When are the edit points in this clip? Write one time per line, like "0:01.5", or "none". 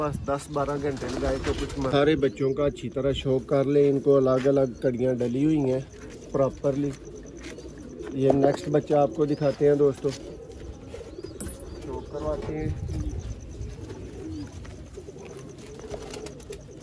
0:01.9